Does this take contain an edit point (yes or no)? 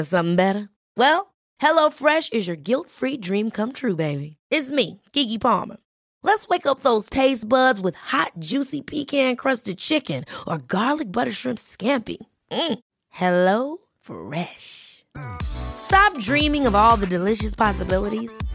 no